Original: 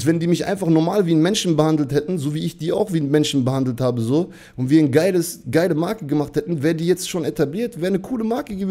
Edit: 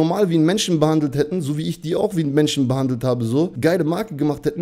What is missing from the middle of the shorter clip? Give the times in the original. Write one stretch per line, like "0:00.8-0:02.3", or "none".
0:04.3-0:05.4